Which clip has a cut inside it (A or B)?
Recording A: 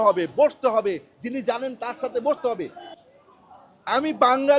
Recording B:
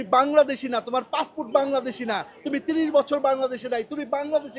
A